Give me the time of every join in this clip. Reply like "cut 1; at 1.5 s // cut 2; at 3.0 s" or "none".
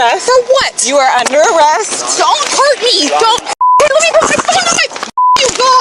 none

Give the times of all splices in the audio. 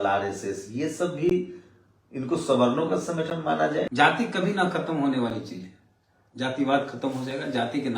cut 1; at 3.9 s

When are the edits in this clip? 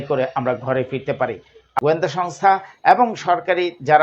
cut 1; at 1.6 s

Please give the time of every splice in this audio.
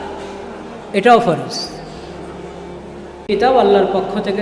cut 1; at 3.3 s

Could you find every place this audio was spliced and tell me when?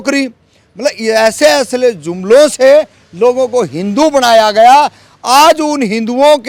none

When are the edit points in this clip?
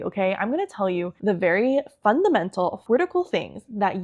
cut 1; at 1.1 s // cut 2; at 2.8 s

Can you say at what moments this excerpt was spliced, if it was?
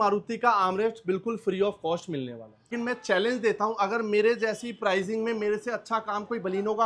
cut 1; at 2.7 s

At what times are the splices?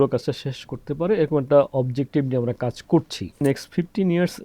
cut 1; at 3.4 s

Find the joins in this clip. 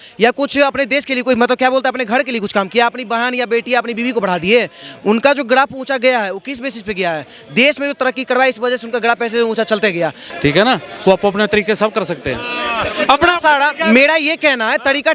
cut 1; at 10.2 s

